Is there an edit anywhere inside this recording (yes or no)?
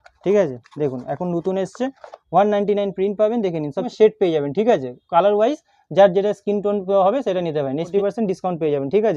yes